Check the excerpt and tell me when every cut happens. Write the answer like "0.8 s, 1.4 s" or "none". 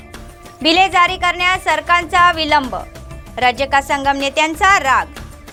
none

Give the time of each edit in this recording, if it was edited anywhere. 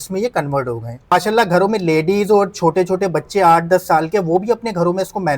1.1 s

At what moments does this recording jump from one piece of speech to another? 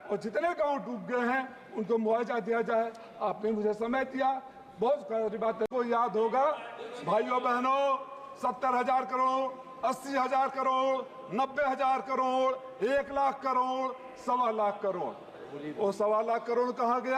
5.7 s

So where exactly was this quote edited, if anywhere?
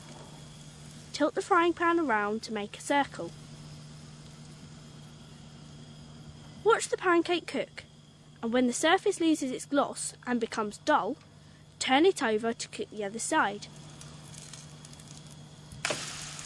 13.5 s

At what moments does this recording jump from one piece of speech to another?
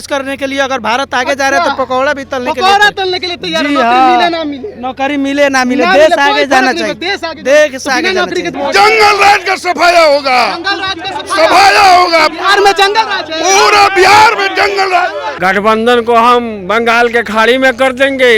8.5 s, 15.3 s

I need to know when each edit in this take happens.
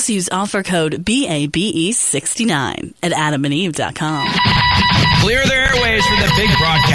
4.2 s

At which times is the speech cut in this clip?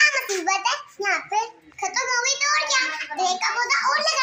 none

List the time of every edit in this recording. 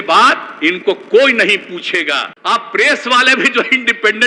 2.2 s

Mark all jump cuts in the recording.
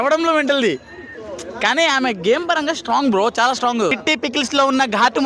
4.0 s

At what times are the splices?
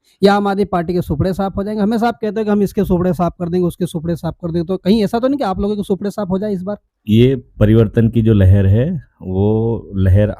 6.9 s

